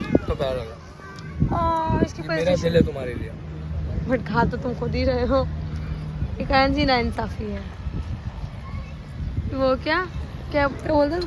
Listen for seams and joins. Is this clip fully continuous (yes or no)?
yes